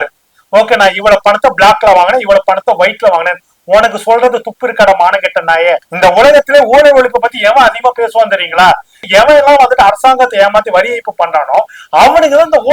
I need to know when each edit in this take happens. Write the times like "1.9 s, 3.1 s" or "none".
5.9 s